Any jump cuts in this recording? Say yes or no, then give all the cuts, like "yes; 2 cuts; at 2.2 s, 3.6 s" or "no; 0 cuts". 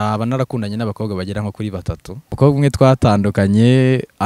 yes; 1 cut; at 2.4 s